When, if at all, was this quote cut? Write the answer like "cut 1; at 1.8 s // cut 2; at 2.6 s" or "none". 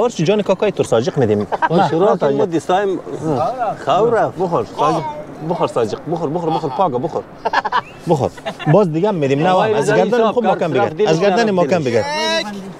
none